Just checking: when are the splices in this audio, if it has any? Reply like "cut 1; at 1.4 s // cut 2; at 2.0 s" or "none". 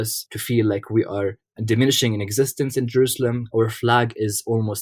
none

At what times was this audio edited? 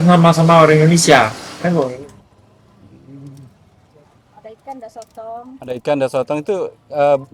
cut 1; at 1.9 s

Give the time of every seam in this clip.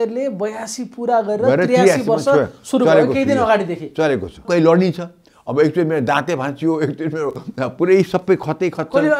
cut 1; at 4.4 s

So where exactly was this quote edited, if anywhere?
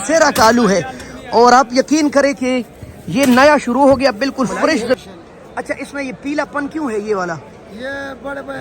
cut 1; at 5.0 s

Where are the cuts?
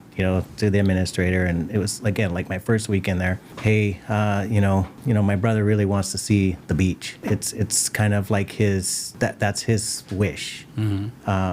cut 1; at 3.5 s // cut 2; at 4.9 s // cut 3; at 7.2 s // cut 4; at 9.0 s

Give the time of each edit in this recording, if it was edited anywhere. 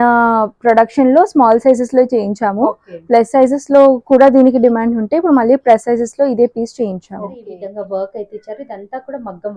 cut 1; at 7.6 s

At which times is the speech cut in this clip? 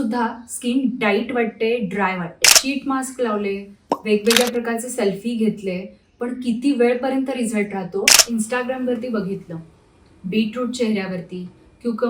cut 1; at 2.6 s // cut 2; at 8.2 s

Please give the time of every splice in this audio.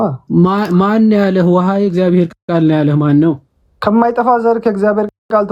none

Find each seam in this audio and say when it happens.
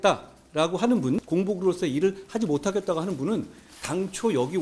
cut 1; at 1.2 s

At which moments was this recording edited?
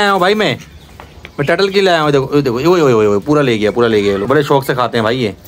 cut 1; at 4.2 s

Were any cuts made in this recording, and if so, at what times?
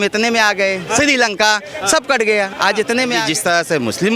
cut 1; at 3.2 s

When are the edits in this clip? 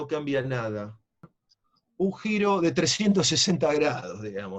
cut 1; at 1.3 s

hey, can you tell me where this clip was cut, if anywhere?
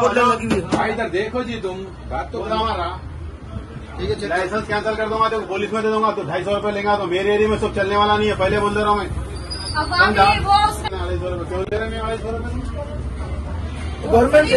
cut 1; at 10.9 s

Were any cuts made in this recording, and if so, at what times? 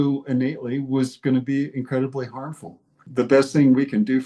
cut 1; at 3.0 s

